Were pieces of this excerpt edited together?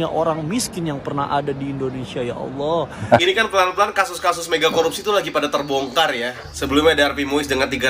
yes; 1 cut; at 3.0 s

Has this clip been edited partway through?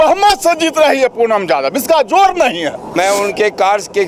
yes; 1 cut; at 3.0 s

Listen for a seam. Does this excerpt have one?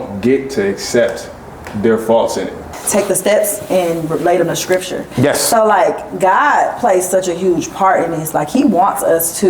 yes; 1 cut; at 2.7 s

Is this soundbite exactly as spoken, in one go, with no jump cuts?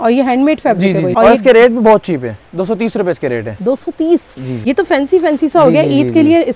no; 2 cuts; at 1.1 s, 4.5 s

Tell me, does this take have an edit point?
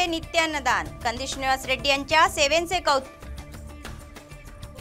no; 0 cuts

